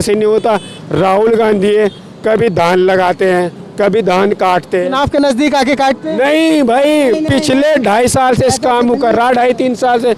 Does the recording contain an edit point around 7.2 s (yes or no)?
no